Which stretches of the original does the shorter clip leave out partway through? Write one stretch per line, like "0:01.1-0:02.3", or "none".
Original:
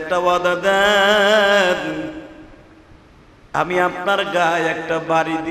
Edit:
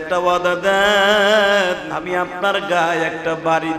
0:01.9-0:03.6

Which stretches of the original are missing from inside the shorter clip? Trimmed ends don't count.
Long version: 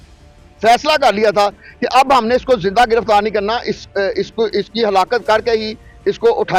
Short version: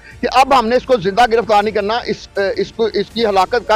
none

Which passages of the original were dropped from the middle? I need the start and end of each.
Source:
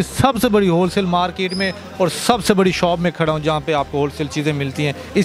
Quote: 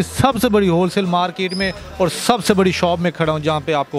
none

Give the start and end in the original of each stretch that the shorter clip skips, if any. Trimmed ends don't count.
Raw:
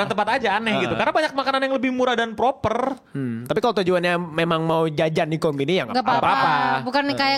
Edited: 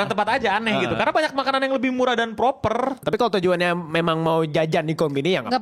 0:03.0-0:03.4

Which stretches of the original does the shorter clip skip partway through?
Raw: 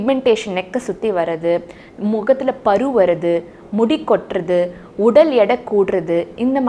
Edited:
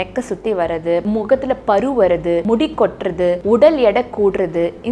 0:01.6-0:02.0
0:03.4-0:03.7
0:04.7-0:04.9

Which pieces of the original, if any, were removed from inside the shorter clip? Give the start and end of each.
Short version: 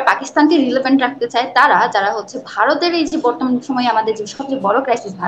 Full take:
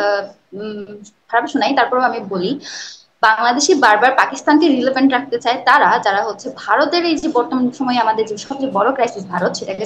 none

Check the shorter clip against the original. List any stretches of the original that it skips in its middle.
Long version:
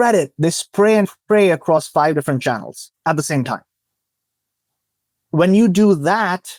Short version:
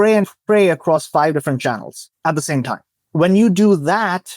0:03.7-0:05.1

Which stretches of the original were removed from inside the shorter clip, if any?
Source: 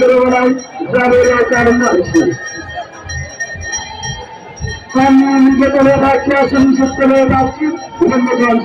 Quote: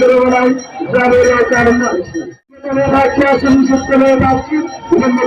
0:02.7-0:05.8

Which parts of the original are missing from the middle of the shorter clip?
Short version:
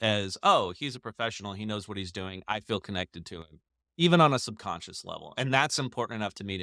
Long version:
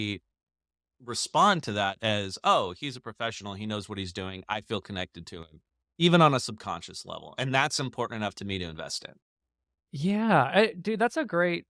none

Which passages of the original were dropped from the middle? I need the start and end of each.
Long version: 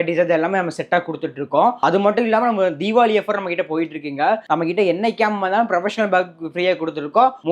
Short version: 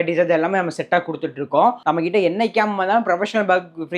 0:01.8-0:04.4

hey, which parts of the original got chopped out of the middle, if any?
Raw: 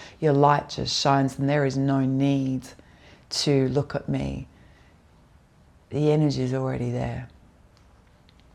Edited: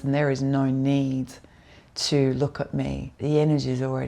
0:04.4-0:05.8

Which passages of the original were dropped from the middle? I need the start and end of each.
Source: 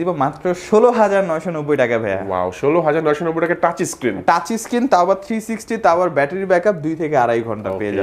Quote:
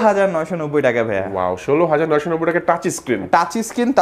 none

